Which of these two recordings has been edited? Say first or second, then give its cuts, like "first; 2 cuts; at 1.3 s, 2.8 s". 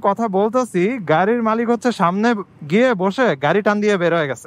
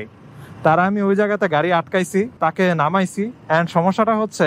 second; 1 cut; at 2.4 s